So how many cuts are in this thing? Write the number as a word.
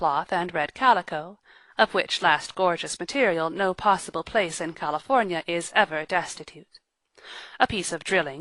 one